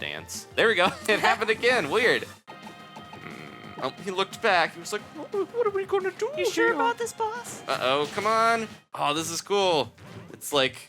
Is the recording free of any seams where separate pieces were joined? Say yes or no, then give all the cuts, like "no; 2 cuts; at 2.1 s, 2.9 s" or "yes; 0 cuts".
no; 2 cuts; at 2.4 s, 8.9 s